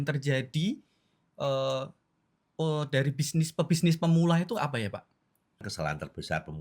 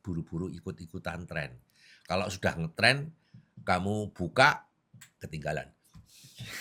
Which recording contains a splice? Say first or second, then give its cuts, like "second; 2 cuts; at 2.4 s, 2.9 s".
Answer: first; 1 cut; at 5.7 s